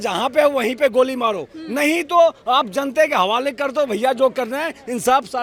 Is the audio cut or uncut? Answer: uncut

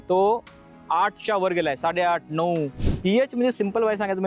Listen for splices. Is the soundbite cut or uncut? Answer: cut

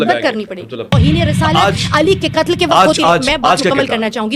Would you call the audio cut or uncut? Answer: cut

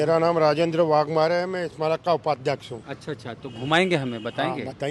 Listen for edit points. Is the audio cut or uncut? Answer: uncut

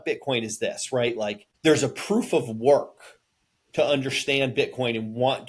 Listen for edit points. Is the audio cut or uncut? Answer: cut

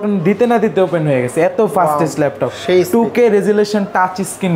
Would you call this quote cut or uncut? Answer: uncut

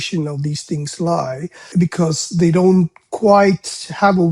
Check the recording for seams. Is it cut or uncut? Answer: cut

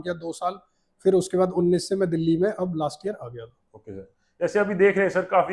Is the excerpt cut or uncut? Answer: uncut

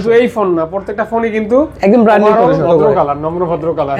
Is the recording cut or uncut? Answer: cut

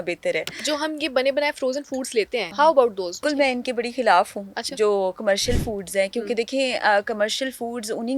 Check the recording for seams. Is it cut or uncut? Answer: cut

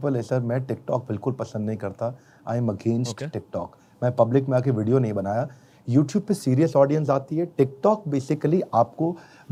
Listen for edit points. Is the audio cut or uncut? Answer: uncut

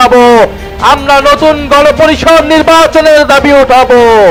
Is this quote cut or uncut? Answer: uncut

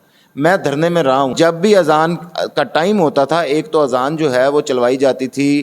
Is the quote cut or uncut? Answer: cut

